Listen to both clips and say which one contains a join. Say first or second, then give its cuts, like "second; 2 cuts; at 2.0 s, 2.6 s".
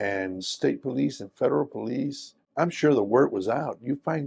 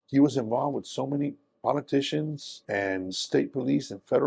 first; 1 cut; at 2.5 s